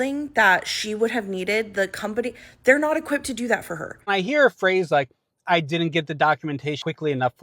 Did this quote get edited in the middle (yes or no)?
yes